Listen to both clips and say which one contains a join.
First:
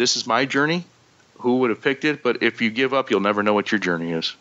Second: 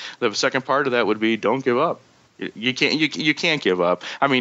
second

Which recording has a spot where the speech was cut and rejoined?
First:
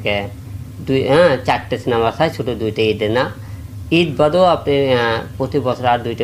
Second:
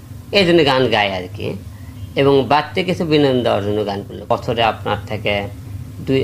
second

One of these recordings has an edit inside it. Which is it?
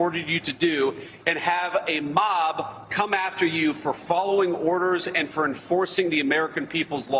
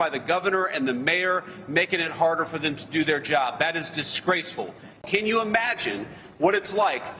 second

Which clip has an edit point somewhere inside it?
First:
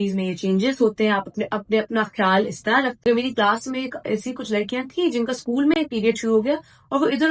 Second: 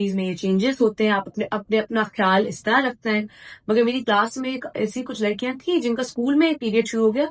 first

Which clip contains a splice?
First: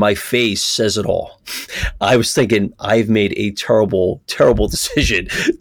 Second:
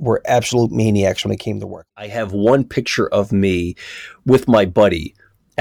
second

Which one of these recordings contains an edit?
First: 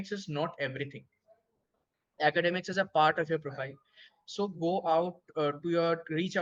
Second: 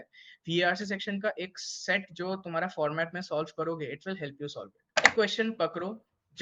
second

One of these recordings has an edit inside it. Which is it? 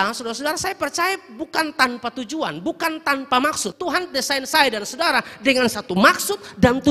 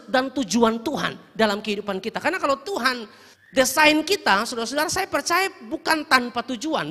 first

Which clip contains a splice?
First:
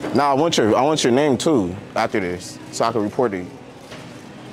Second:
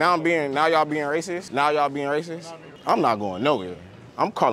second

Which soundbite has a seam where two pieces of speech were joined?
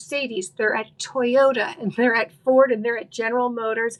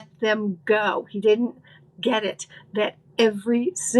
second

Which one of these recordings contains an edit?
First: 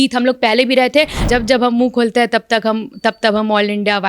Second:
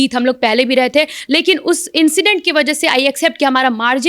first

